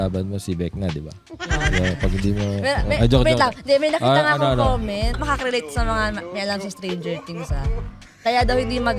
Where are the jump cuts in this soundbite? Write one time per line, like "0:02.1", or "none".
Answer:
0:05.1